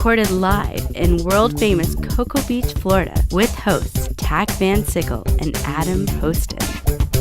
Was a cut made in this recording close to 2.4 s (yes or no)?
no